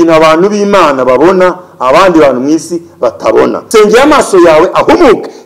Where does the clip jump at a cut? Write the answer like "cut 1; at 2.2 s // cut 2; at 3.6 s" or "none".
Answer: cut 1; at 3.6 s

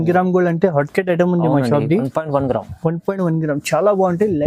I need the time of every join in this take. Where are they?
none

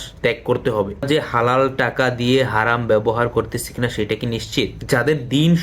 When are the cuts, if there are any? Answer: cut 1; at 1.1 s // cut 2; at 4.8 s

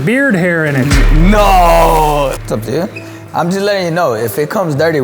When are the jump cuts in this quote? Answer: cut 1; at 2.3 s

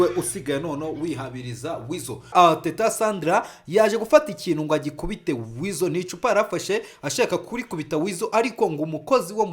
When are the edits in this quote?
cut 1; at 2.3 s

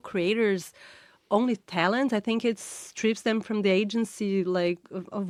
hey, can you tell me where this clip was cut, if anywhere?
none

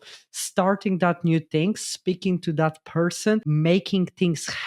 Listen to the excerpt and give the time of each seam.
cut 1; at 3.5 s

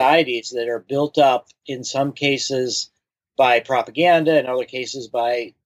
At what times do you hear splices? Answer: none

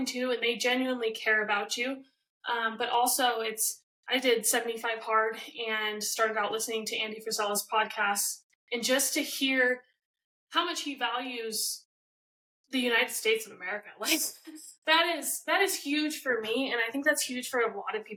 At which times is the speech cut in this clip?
none

